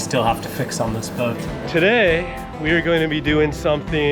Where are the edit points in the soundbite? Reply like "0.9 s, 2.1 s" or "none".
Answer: 1.5 s